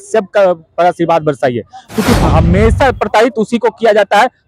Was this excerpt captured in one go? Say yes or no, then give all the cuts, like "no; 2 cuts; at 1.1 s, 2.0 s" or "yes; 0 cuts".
no; 1 cut; at 2.1 s